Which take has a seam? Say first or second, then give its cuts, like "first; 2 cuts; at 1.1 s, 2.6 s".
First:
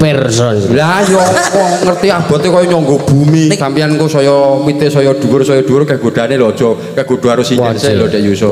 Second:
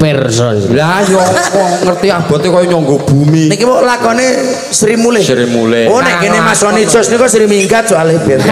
first; 1 cut; at 3.6 s